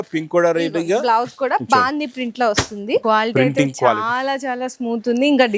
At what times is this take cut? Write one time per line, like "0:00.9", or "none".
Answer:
0:03.0